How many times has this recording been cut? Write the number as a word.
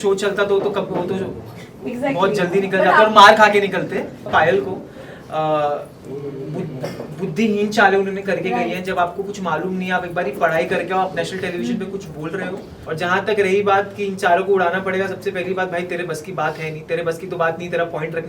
two